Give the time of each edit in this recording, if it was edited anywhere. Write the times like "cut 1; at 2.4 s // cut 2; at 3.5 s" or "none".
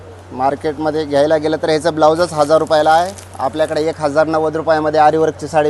none